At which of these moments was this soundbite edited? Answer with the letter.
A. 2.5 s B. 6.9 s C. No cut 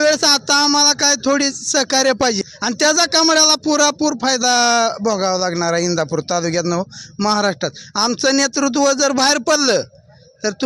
A